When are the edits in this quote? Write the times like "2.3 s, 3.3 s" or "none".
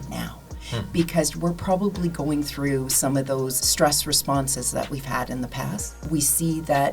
3.6 s, 6.0 s